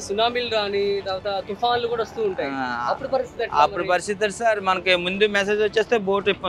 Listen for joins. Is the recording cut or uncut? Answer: uncut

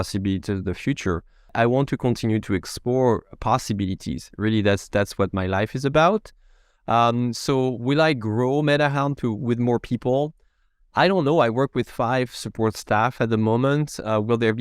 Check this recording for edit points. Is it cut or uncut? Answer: cut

